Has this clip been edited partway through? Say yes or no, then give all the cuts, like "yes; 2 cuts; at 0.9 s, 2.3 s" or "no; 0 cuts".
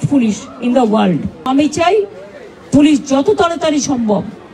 yes; 1 cut; at 1.5 s